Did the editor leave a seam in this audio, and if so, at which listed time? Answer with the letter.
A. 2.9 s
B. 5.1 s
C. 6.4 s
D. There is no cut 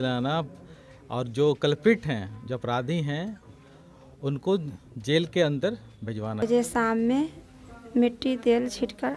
C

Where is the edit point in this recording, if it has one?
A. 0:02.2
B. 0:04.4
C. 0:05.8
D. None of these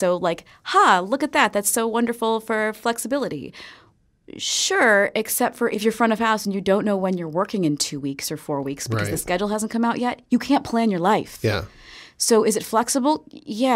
C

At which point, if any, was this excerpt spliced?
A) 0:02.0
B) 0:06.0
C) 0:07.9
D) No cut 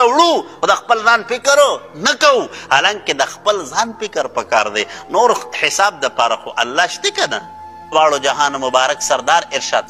C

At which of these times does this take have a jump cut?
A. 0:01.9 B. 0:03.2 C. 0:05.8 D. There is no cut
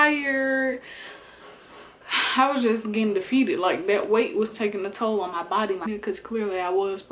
C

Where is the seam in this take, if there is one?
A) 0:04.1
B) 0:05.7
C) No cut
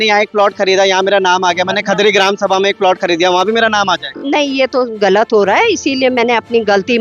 A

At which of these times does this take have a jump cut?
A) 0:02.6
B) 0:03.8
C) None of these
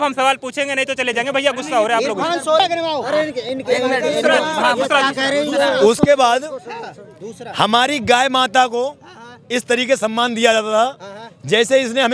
A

